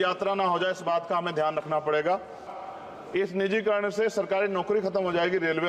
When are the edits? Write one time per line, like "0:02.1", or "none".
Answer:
0:02.6

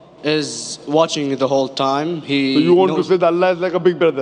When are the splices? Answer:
none

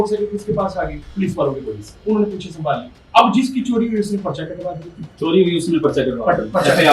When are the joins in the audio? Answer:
0:01.0
0:02.9
0:05.1

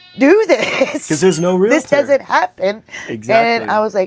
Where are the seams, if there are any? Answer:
none

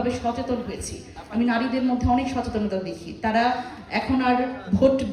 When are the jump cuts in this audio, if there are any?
0:01.1

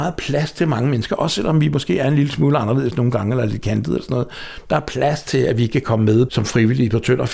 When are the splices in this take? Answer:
0:06.3

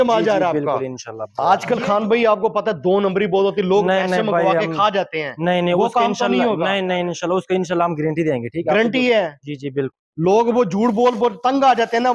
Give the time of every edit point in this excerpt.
0:01.3

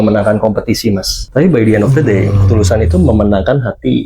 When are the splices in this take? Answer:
0:01.1

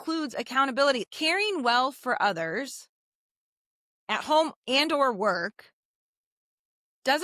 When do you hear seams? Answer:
0:01.0

